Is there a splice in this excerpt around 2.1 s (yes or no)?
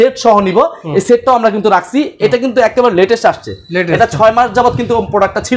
no